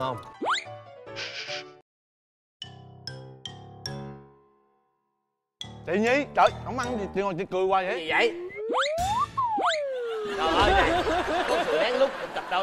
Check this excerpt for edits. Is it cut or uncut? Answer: uncut